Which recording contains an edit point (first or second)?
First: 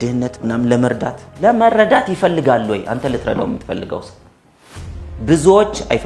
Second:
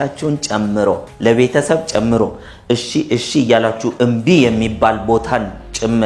second